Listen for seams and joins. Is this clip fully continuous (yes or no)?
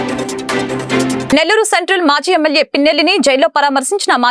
yes